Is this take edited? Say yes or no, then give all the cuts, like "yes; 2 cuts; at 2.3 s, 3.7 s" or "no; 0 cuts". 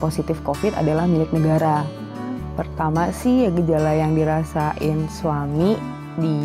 yes; 1 cut; at 2.4 s